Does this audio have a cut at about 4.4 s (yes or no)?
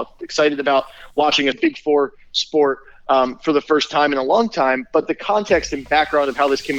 no